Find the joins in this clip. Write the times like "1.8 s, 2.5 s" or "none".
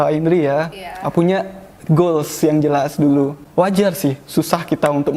3.4 s